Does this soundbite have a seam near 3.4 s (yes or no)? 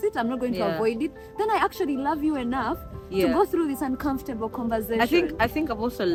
no